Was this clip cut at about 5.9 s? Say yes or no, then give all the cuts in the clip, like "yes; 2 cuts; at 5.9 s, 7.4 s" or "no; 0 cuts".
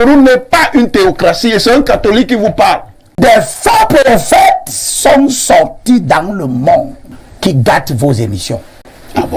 no; 1 cut; at 3.2 s